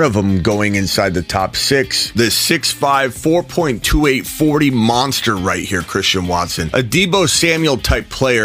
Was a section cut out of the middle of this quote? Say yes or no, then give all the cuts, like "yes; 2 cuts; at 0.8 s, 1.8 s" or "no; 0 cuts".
yes; 1 cut; at 2.1 s